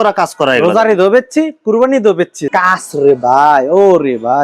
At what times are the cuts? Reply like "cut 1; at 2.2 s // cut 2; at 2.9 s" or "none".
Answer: cut 1; at 2.4 s

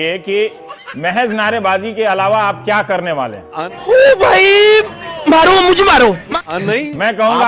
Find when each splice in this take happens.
cut 1; at 6.3 s

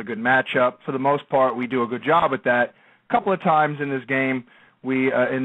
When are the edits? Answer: cut 1; at 3.2 s

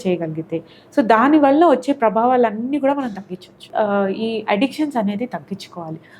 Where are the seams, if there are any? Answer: cut 1; at 3.7 s

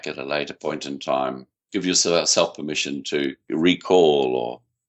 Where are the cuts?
cut 1; at 1.5 s // cut 2; at 3.5 s

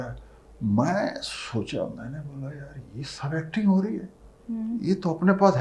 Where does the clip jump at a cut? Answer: none

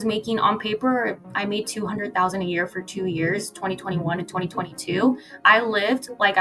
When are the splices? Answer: none

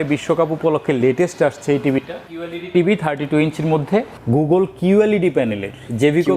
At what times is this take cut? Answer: cut 1; at 2.3 s // cut 2; at 4.1 s

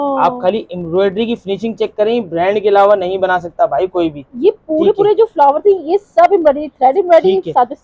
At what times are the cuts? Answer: none

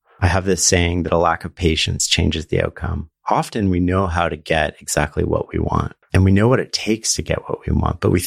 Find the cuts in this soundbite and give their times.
cut 1; at 6.0 s

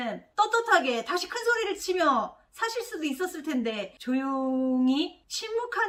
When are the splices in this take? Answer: none

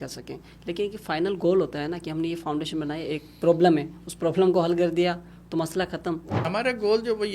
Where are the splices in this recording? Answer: cut 1; at 6.3 s

